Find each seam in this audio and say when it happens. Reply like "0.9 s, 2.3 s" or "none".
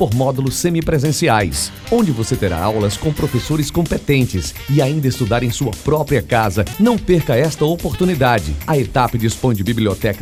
none